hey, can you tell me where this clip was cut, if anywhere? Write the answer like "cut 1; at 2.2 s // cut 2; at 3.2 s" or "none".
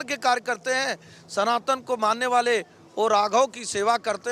none